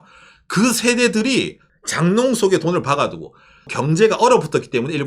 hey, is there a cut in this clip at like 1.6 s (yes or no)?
yes